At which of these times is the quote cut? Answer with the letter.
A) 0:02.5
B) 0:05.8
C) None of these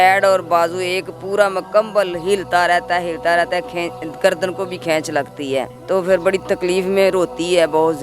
B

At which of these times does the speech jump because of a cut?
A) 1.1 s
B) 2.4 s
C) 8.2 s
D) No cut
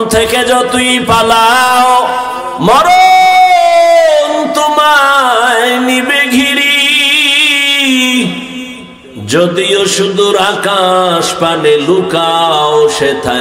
B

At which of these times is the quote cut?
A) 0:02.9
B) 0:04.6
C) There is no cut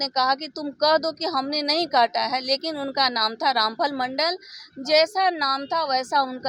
C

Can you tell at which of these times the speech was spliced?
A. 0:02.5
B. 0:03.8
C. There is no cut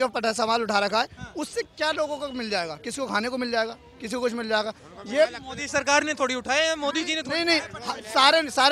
C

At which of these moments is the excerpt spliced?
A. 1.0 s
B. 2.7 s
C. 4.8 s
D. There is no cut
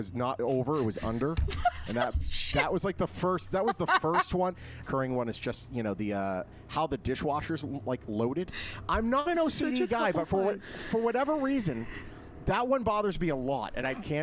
C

